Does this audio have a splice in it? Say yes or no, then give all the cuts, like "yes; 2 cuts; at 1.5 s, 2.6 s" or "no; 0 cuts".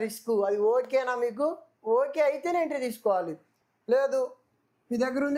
no; 0 cuts